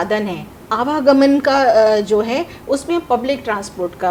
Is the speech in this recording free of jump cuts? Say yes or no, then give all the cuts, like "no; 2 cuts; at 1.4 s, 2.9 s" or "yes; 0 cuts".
yes; 0 cuts